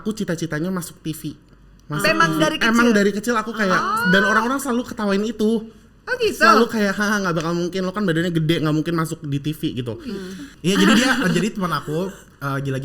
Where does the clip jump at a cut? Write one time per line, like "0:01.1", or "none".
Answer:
0:10.4